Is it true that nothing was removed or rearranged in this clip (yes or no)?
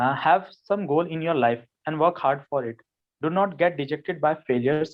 yes